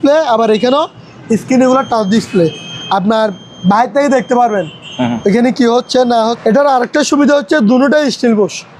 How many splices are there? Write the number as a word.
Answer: one